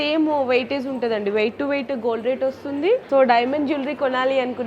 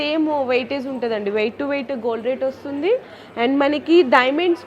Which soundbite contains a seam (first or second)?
first